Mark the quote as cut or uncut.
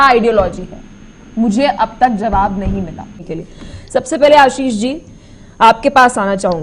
cut